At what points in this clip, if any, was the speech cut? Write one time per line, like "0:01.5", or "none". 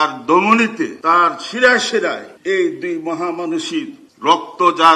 0:01.0
0:02.3
0:04.0